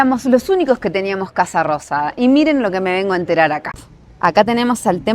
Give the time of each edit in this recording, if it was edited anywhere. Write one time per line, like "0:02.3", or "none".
none